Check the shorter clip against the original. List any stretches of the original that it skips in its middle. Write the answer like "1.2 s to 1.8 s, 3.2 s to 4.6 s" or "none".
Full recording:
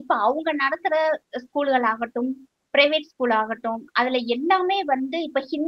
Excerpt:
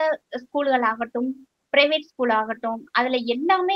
none

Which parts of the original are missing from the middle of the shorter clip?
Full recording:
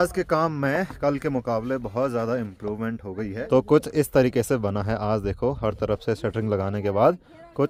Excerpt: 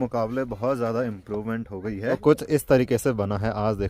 3.5 s to 3.6 s

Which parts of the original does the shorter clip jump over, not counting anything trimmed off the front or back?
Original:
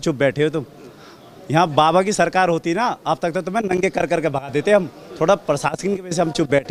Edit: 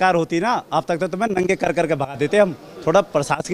none

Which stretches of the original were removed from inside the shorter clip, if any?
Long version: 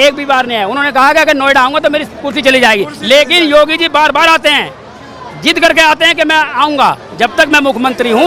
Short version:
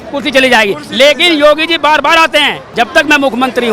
4.7 s to 7.1 s

